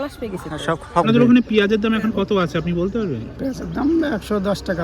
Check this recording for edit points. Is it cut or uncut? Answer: cut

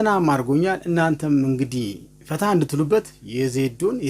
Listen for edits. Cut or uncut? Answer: cut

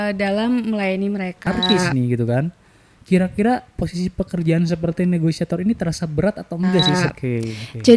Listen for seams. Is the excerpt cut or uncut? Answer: cut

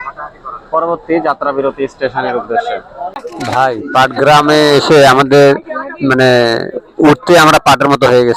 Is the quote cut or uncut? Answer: cut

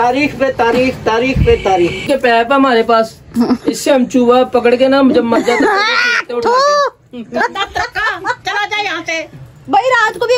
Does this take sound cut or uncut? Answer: cut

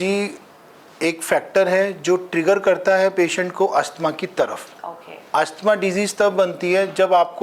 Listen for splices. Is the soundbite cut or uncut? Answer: uncut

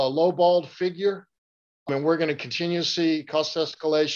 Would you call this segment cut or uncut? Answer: uncut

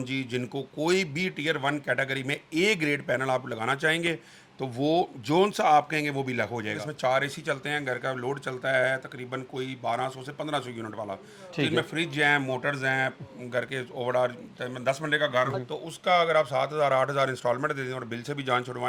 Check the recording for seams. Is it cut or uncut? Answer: cut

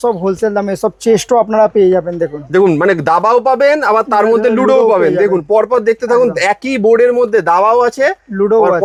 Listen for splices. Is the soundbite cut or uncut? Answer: uncut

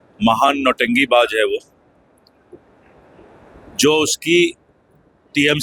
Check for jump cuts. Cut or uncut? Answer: uncut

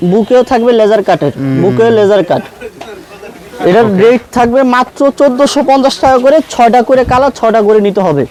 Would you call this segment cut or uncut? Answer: uncut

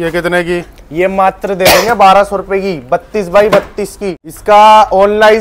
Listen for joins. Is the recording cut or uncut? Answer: cut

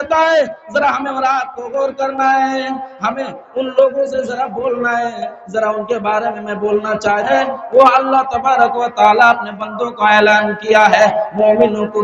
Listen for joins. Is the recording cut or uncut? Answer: cut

